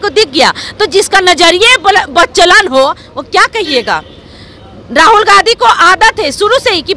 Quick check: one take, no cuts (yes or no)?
yes